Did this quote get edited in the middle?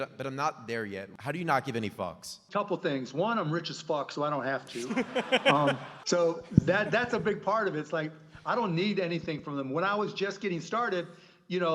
yes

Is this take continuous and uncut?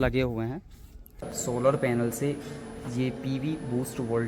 no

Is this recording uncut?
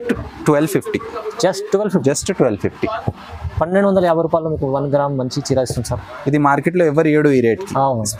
yes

